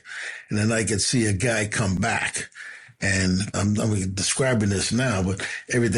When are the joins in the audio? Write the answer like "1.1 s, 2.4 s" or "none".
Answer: 3.6 s